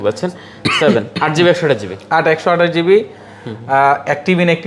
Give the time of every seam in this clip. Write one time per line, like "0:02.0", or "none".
none